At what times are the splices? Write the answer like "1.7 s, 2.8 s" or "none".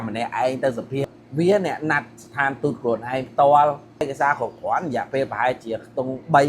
1.0 s, 4.0 s